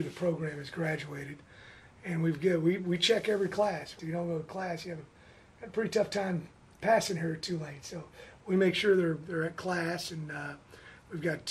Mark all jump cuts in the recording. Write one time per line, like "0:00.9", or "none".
0:03.9